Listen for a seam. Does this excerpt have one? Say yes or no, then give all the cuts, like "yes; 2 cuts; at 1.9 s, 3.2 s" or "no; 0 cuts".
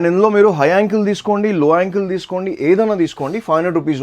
no; 0 cuts